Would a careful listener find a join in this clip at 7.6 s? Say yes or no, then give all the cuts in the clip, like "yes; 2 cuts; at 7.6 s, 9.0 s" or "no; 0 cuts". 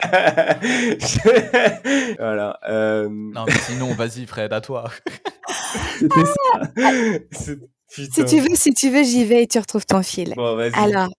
no; 1 cut; at 2.1 s